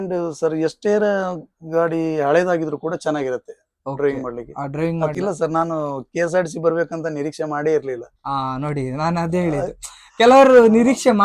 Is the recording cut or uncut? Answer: cut